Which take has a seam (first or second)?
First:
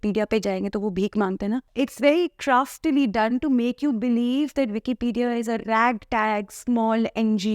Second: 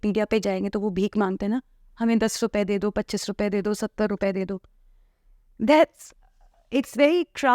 first